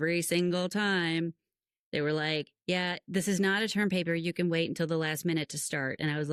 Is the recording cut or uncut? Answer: uncut